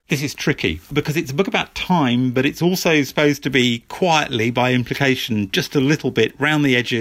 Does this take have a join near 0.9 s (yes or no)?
yes